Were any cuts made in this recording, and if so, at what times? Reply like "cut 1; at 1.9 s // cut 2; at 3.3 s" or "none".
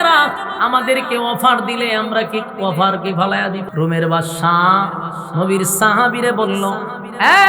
cut 1; at 3.6 s